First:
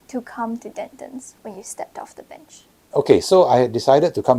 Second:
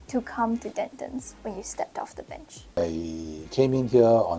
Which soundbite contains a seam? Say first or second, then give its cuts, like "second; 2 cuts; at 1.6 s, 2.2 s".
second; 1 cut; at 2.7 s